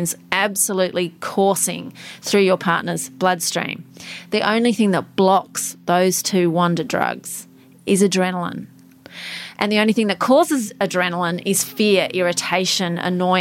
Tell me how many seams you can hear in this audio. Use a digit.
0